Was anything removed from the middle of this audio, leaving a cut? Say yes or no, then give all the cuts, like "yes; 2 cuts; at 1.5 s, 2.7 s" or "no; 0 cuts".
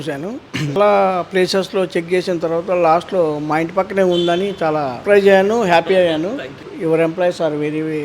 yes; 3 cuts; at 0.8 s, 5.0 s, 6.7 s